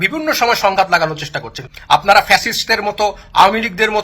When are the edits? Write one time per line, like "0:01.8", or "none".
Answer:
0:01.5